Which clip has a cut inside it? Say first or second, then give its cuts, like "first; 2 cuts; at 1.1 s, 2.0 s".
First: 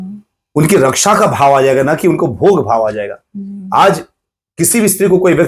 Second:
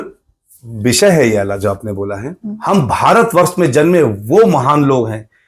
second; 1 cut; at 2.5 s